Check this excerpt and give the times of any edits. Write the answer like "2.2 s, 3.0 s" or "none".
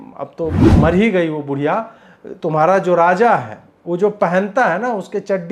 none